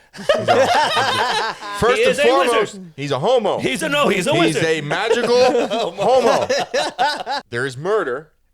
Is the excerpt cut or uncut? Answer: cut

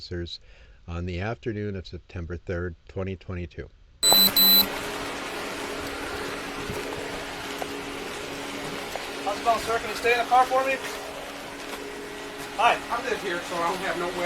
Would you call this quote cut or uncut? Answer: cut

